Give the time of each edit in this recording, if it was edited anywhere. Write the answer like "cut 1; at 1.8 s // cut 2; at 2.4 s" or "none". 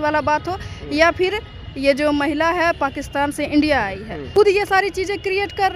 cut 1; at 4.2 s